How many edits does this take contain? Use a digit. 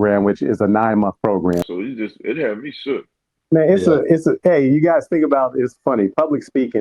1